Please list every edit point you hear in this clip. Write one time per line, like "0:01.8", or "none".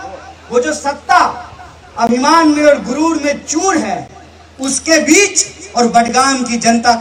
none